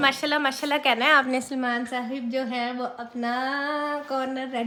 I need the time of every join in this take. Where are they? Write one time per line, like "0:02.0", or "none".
none